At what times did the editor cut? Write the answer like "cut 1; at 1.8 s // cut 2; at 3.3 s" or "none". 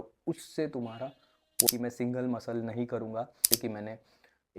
cut 1; at 1.7 s // cut 2; at 3.4 s